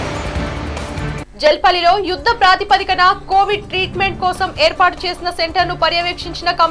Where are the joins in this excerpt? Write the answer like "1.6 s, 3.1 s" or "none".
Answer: 1.2 s